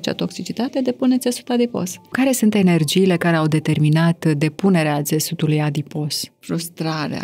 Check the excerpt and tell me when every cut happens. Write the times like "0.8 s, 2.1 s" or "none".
2.1 s, 6.3 s